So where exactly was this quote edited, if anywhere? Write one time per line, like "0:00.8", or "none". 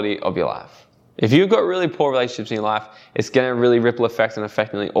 none

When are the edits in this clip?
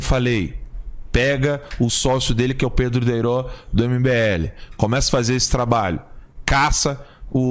0:06.5

